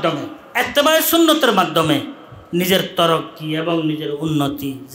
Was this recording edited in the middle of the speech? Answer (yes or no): no